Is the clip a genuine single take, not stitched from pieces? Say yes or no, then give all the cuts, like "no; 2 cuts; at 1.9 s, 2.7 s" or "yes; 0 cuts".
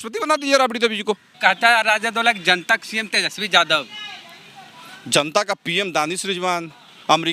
no; 1 cut; at 1.3 s